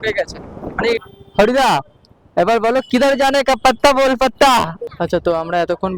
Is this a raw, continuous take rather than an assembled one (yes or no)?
no